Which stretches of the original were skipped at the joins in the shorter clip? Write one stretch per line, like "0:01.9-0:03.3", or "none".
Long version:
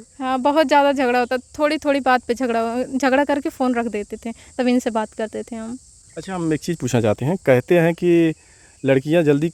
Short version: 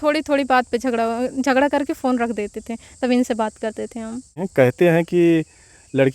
0:06.0-0:07.3

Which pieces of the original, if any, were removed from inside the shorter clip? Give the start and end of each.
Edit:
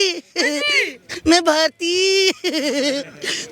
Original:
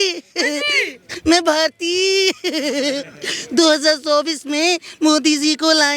none

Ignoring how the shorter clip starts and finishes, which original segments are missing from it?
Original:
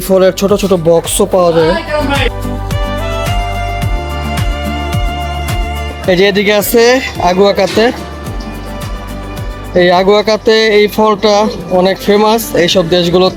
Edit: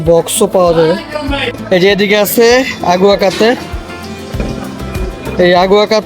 0:02.3-0:05.9

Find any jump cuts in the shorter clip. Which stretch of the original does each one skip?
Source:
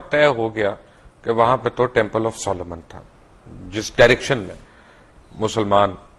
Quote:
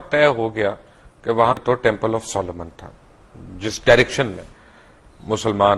0:01.6-0:01.7

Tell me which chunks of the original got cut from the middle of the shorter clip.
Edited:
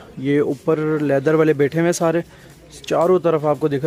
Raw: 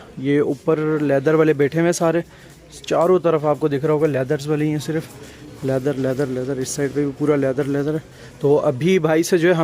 none

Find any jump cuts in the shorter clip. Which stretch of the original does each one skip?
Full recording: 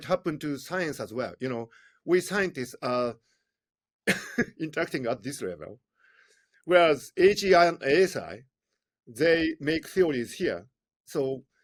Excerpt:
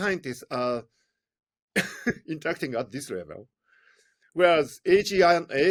none

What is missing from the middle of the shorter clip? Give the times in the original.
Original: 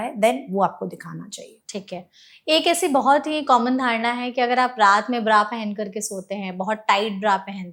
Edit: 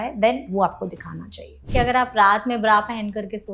0:01.6-0:04.3

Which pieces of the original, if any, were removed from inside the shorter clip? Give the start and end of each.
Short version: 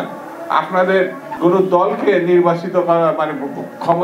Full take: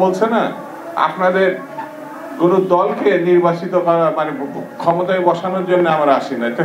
0:01.7-0:02.2

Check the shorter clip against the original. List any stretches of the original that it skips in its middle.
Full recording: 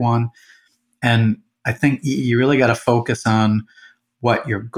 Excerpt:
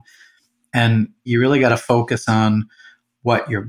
0:01.6-0:02.3

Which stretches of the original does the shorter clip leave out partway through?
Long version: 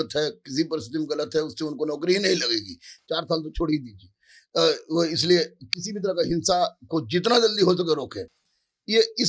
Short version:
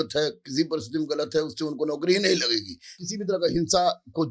0:02.9-0:05.7

